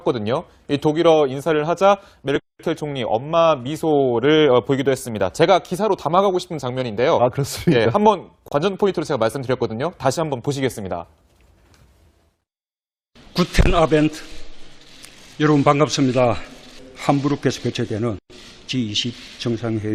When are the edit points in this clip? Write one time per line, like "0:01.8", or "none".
none